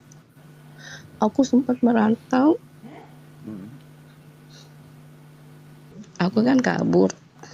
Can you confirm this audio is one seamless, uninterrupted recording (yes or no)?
no